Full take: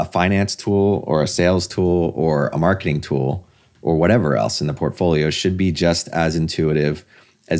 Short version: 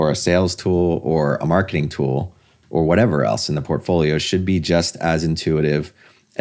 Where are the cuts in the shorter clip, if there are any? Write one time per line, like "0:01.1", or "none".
none